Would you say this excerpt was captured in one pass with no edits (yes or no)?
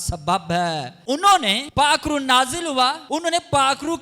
no